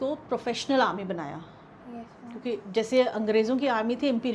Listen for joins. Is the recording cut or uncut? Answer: uncut